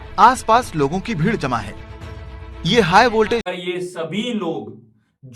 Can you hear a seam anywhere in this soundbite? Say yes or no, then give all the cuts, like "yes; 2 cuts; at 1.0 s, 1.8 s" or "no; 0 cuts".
yes; 1 cut; at 3.5 s